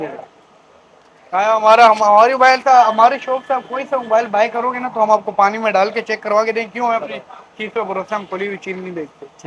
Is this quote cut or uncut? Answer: uncut